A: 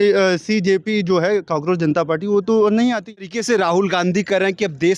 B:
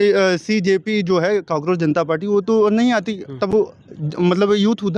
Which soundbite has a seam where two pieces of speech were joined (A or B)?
A